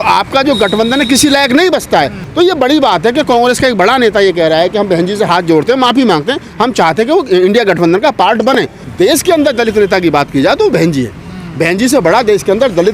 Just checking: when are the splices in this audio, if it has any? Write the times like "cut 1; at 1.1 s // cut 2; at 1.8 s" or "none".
cut 1; at 2.2 s // cut 2; at 8.8 s